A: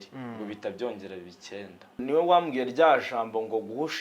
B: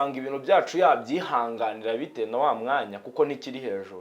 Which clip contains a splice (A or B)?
A